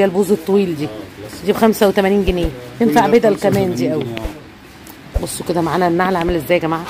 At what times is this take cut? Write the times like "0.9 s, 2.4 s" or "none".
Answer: none